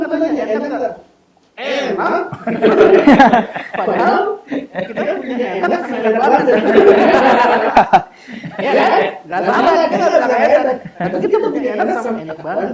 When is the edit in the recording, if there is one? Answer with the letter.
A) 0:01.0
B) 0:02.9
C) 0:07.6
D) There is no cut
D